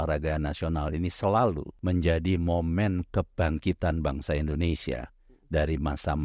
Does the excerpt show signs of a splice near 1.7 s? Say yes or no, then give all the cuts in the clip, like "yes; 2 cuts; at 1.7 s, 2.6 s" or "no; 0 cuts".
yes; 1 cut; at 1.7 s